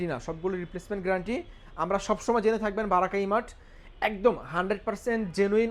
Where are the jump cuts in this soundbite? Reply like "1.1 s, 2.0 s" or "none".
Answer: none